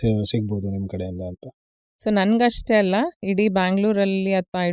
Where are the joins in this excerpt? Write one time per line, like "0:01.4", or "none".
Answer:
0:01.8